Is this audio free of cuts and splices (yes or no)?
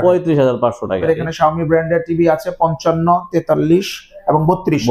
no